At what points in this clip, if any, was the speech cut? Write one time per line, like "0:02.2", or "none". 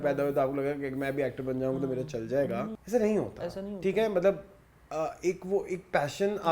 0:02.8